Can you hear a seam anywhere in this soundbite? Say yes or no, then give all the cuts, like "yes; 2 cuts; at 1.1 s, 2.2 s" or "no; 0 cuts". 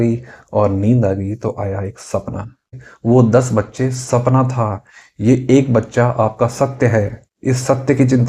yes; 1 cut; at 2.7 s